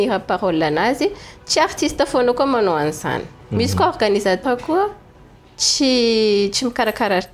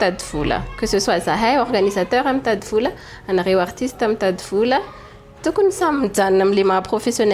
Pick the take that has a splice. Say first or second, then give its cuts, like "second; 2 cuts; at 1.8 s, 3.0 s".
first; 1 cut; at 4.4 s